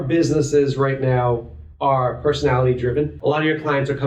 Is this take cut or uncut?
cut